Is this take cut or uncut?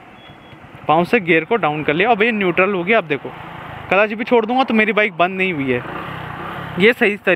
uncut